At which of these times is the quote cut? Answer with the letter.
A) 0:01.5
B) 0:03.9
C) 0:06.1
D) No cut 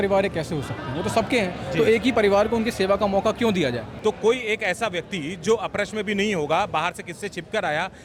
B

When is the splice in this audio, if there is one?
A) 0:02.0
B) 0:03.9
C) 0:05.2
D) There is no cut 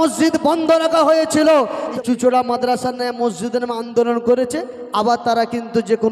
A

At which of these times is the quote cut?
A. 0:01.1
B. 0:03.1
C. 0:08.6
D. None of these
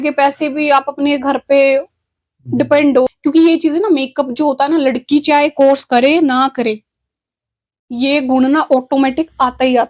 B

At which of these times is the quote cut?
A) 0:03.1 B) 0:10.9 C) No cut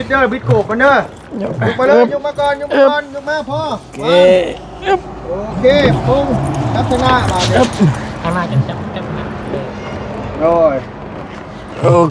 C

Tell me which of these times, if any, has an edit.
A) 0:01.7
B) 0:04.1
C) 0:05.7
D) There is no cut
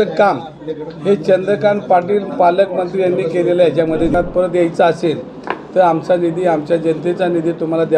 B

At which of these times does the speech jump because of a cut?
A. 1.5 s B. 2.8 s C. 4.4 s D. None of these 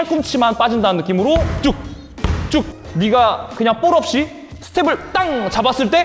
B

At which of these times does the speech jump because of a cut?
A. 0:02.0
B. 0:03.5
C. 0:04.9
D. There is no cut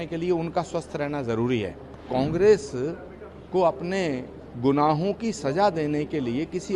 A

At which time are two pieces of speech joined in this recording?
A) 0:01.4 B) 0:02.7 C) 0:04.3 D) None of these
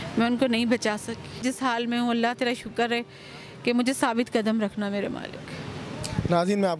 A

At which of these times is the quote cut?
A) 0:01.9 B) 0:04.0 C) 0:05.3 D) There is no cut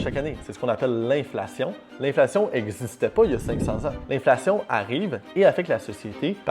A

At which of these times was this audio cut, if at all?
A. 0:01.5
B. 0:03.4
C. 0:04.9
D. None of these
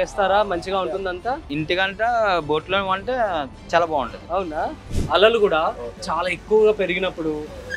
C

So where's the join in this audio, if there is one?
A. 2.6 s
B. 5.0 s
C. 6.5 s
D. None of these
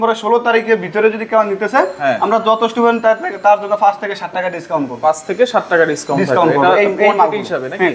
D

